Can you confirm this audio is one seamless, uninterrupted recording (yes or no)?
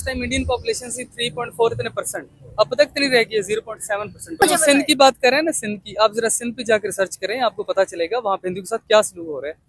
no